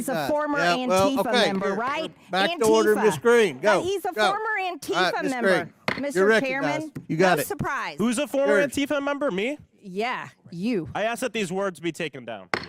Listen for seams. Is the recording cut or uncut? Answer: uncut